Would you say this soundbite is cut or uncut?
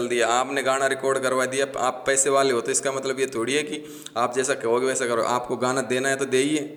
uncut